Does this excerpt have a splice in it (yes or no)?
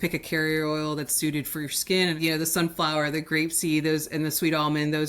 yes